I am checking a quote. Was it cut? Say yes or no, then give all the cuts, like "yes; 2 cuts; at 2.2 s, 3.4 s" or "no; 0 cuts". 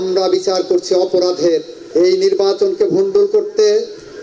yes; 1 cut; at 1.8 s